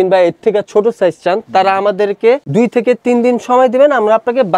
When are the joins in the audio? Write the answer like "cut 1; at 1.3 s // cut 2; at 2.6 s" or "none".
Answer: none